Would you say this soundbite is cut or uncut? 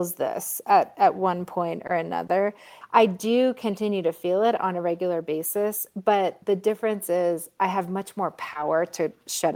cut